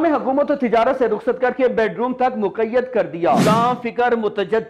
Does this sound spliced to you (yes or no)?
yes